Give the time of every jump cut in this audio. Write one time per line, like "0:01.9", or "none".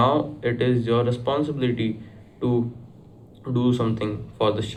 none